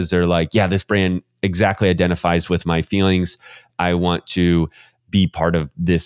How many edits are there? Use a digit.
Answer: 1